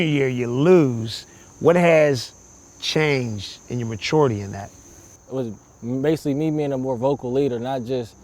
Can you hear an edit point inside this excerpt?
yes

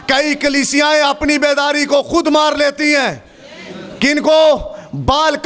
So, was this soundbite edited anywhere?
no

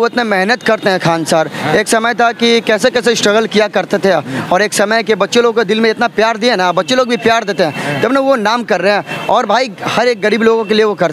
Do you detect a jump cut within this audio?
no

